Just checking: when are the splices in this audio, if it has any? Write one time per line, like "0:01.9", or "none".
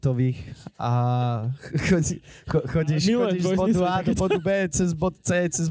none